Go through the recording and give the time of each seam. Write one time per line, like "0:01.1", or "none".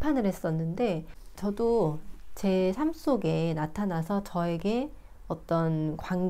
0:01.2